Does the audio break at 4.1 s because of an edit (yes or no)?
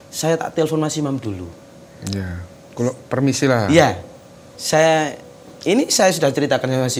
no